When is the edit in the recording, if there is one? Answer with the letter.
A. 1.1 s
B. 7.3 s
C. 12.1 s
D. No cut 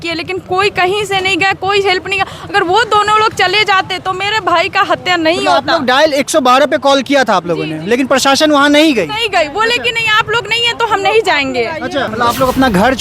C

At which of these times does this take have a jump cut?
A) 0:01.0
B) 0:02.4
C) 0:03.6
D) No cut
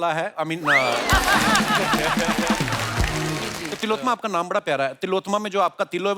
C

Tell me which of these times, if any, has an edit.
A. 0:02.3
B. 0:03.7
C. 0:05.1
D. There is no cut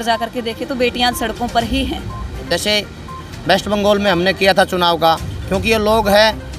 A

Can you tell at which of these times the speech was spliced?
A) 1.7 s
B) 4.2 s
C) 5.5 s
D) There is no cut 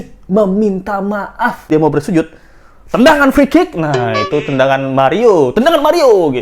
A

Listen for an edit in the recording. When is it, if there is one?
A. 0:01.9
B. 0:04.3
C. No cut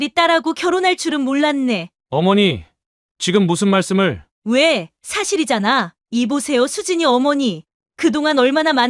B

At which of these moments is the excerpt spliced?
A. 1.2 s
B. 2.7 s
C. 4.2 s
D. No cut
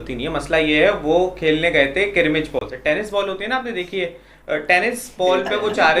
D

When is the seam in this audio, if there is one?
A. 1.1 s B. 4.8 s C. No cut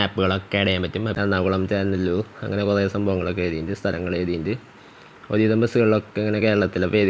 A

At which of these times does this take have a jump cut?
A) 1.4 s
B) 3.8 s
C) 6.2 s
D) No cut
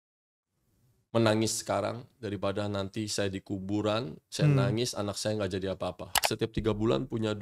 C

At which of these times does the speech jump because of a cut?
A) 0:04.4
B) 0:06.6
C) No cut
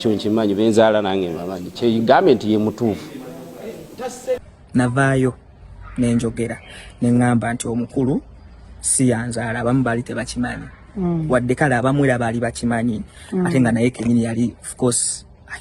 A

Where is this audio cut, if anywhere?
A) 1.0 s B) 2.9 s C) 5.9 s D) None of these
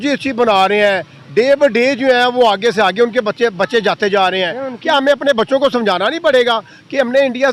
D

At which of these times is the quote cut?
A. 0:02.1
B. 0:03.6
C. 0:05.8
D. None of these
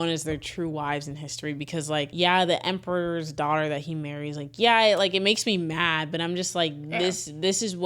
A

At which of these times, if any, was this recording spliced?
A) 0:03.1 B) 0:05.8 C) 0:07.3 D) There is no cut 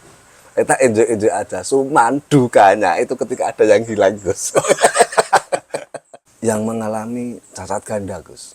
B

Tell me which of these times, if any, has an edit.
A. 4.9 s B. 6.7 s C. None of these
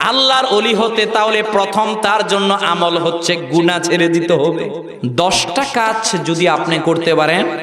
A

